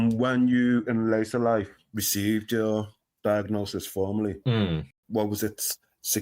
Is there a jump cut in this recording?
yes; 1 cut; at 5.0 s

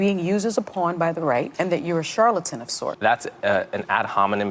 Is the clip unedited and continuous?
no; 2 cuts; at 1.5 s, 2.8 s

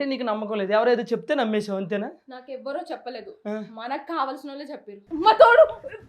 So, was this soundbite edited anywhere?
yes; 1 cut; at 5.1 s

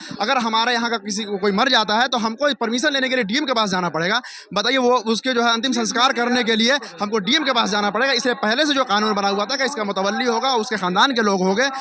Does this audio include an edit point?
no; 0 cuts

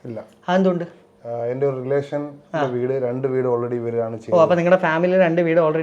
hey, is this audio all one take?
yes; 0 cuts

